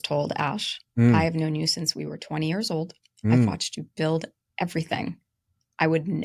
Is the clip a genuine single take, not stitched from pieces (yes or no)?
yes